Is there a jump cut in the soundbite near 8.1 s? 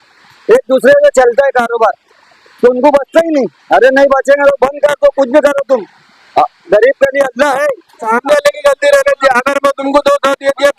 yes; 1 cut; at 8.1 s

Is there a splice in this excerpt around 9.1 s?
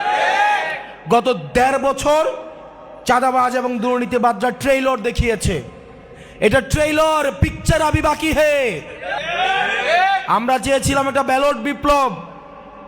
yes; 1 cut; at 9.1 s

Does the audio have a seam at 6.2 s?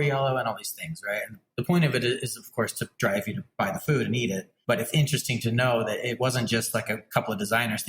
yes; 4 cuts; at 1.4 s, 3.4 s, 4.5 s, 6.2 s

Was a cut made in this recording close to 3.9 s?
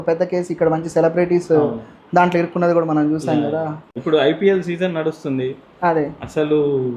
yes; 1 cut; at 3.9 s

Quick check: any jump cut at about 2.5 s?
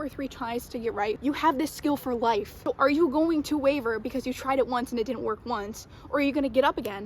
yes; 2 cuts; at 1.2 s, 2.5 s

